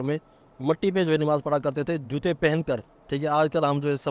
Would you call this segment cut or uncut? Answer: uncut